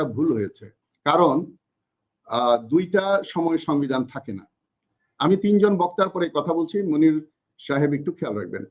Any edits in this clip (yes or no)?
no